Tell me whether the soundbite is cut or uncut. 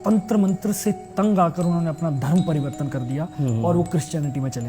cut